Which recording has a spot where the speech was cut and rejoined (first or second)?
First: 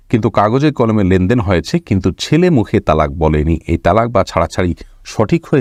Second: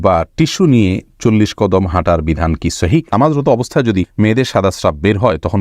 second